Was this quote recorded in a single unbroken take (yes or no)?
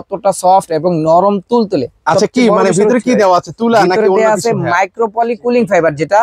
yes